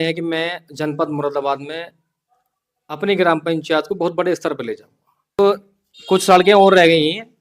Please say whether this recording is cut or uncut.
cut